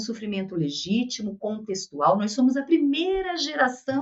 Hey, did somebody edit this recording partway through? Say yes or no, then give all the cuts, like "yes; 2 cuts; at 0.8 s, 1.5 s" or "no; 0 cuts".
no; 0 cuts